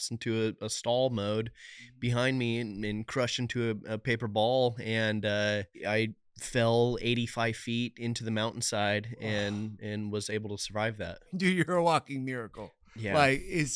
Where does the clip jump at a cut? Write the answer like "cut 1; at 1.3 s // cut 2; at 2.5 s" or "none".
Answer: none